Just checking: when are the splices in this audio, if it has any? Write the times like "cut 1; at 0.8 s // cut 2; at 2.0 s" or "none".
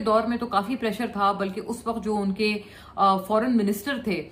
none